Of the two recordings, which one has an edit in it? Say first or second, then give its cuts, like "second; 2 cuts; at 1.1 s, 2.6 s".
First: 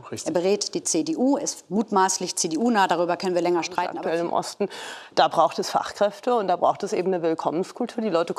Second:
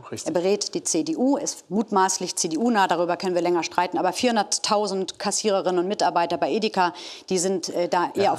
first; 1 cut; at 3.9 s